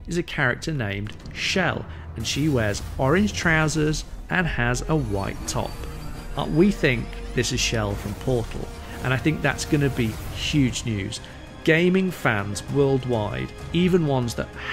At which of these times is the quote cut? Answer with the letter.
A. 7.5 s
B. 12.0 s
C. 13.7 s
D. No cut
D